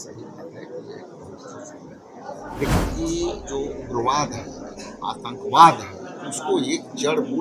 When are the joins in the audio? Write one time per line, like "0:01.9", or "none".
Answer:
0:02.7